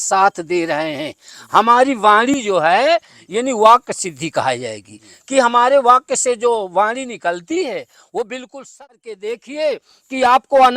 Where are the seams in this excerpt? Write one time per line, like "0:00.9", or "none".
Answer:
0:08.8